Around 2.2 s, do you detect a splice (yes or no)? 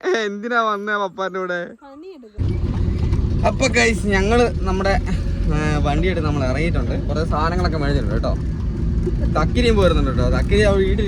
yes